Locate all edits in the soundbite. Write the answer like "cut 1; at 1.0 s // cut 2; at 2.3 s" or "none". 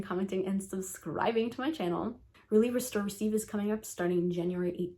cut 1; at 2.3 s